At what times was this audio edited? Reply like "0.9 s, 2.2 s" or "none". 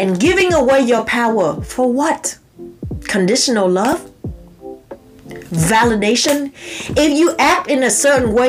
none